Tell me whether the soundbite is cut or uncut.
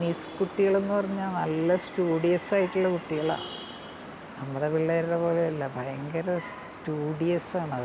uncut